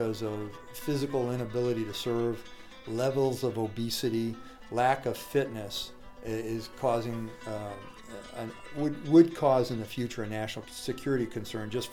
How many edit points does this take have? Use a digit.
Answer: 1